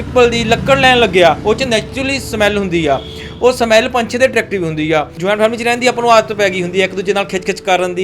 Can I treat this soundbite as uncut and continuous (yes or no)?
no